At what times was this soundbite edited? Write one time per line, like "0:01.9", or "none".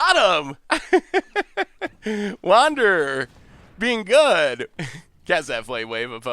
0:04.7